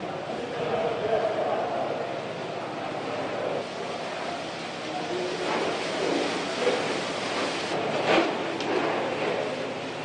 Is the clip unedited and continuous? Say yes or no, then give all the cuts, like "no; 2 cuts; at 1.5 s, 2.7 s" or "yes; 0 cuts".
yes; 0 cuts